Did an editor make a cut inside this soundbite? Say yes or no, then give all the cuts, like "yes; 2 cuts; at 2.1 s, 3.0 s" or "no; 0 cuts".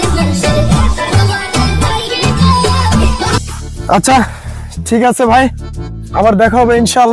no; 0 cuts